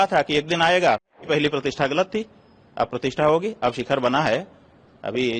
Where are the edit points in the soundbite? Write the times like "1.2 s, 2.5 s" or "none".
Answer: 1.2 s